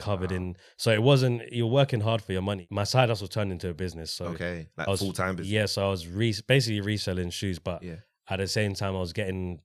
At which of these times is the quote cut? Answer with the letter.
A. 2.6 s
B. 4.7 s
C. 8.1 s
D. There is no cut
A